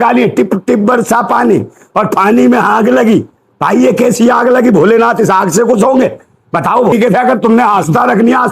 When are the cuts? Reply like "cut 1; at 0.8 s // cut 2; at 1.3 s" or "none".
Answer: cut 1; at 6.9 s